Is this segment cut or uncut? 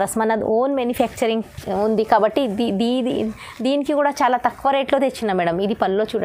uncut